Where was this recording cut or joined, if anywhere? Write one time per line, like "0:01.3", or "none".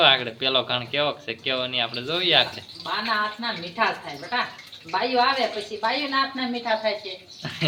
none